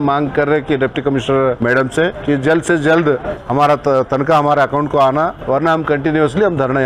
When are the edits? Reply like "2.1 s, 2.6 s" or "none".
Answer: 1.8 s, 3.4 s, 5.4 s